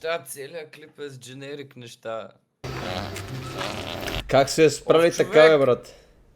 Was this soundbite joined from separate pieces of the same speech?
yes; 1 cut; at 2.6 s

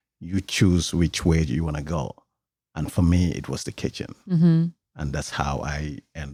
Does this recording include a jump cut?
no; 0 cuts

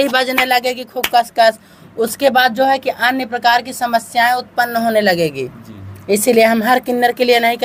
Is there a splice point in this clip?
no; 0 cuts

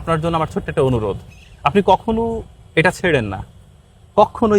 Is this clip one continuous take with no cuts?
yes; 0 cuts

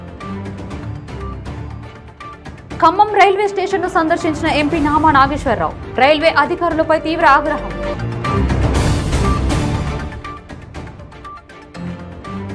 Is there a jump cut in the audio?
yes; 1 cut; at 1.0 s

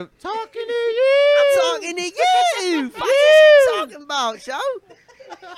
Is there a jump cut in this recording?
no; 0 cuts

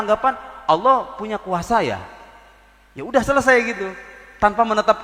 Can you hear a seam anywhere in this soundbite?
no; 0 cuts

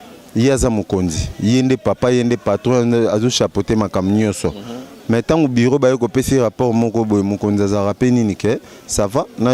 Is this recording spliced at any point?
no; 0 cuts

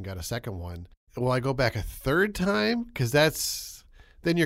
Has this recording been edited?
yes; 1 cut; at 1.0 s

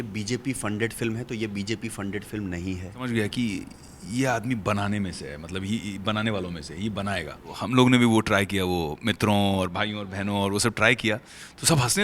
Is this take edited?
yes; 2 cuts; at 3.1 s, 7.6 s

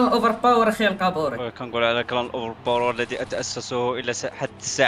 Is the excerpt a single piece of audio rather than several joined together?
yes; 0 cuts

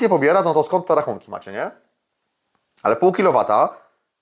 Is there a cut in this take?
no; 0 cuts

